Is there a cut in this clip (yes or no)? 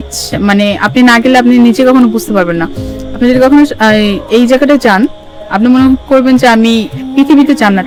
no